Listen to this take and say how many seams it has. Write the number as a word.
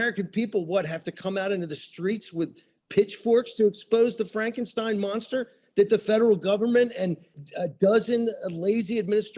one